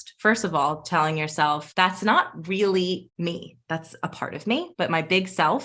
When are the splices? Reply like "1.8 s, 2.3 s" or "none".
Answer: 1.7 s, 3.1 s, 4.7 s